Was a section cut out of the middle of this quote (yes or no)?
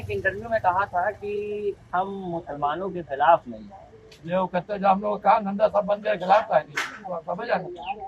no